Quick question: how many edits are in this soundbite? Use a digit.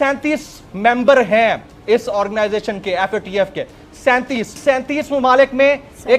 1